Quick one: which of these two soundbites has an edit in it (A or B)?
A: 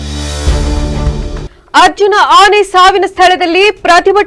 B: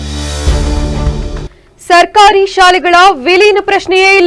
B